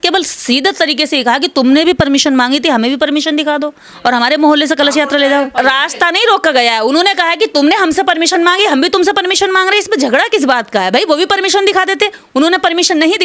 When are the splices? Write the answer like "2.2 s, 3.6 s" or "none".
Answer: 5.5 s